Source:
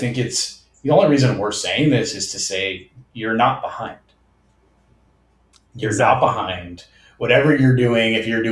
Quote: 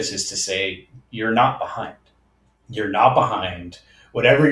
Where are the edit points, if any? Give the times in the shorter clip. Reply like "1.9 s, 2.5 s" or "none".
3.0 s